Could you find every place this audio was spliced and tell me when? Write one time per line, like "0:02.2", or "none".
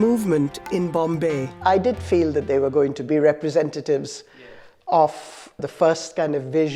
0:01.5
0:03.0
0:05.6

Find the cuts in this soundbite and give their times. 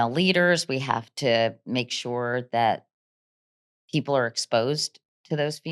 none

